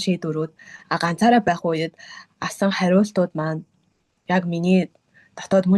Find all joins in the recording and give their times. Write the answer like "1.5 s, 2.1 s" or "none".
none